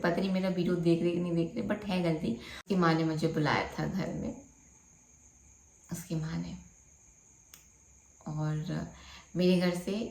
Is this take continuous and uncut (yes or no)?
no